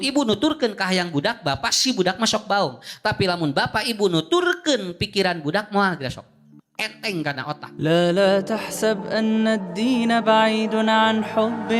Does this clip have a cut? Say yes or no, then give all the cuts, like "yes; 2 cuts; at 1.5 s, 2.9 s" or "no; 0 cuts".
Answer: yes; 1 cut; at 7.7 s